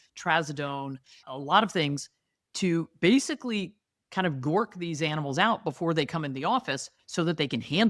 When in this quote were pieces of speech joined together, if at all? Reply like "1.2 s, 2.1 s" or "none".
none